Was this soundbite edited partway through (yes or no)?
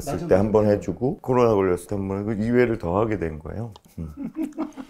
no